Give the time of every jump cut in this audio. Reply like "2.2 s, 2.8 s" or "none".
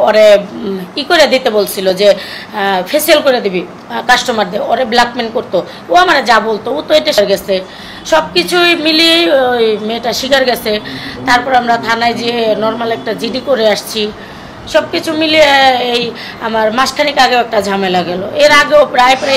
none